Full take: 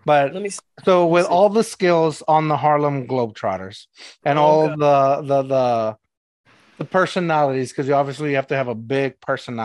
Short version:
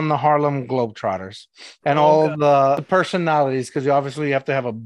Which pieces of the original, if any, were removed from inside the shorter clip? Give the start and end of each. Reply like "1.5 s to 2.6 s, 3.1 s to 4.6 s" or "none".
5.2 s to 6.8 s